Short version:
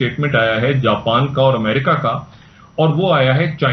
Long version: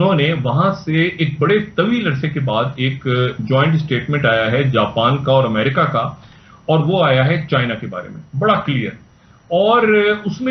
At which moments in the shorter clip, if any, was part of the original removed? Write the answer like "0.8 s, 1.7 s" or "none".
none